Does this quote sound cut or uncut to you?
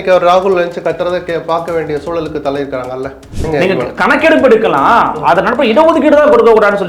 cut